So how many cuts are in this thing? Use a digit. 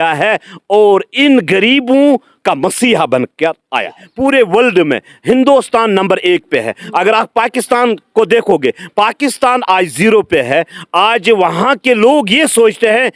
1